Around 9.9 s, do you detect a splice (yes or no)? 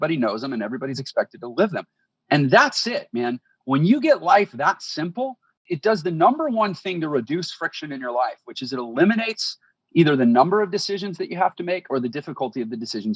no